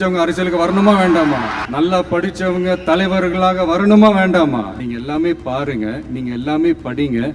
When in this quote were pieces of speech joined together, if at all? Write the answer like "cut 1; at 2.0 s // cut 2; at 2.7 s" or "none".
cut 1; at 1.6 s // cut 2; at 4.8 s